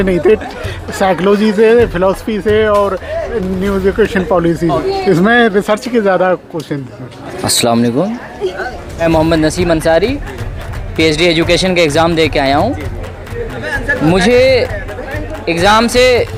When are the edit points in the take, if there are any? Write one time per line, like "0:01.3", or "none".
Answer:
none